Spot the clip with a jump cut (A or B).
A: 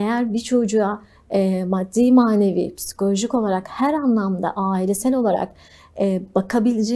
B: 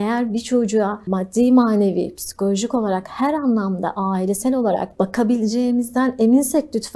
B